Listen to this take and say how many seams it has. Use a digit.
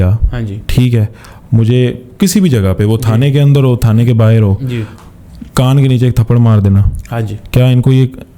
0